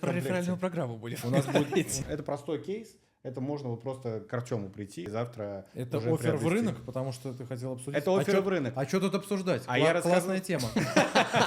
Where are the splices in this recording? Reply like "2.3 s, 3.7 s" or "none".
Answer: 1.9 s, 5.1 s

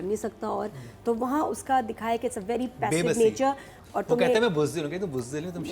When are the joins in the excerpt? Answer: 3.7 s

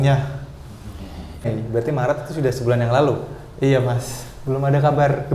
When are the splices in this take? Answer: 1.6 s

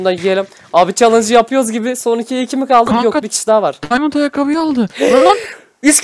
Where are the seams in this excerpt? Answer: none

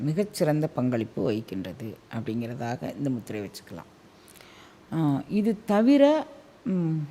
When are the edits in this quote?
none

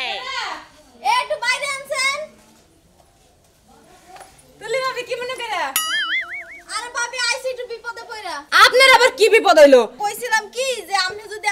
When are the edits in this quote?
10.0 s

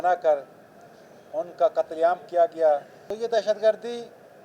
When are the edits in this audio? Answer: 3.0 s

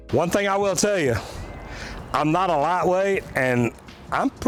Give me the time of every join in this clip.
none

